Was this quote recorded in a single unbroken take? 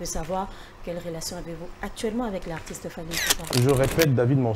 no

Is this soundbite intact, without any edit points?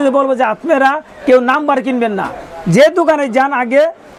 yes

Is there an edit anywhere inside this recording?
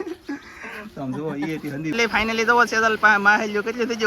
yes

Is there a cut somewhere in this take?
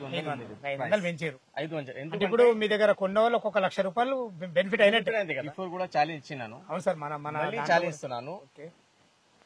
yes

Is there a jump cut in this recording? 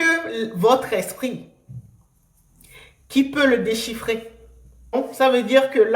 yes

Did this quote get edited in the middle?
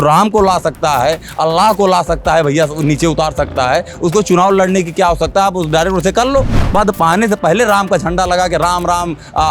yes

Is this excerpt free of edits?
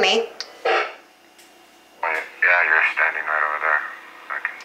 yes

